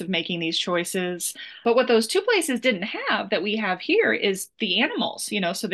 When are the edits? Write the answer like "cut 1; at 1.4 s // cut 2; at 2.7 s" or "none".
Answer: cut 1; at 1.6 s